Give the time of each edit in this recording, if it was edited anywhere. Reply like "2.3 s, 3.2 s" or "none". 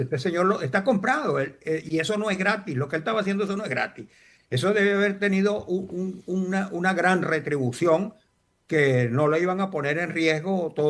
none